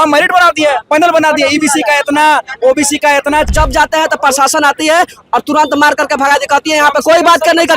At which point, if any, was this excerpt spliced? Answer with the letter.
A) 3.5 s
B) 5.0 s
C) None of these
A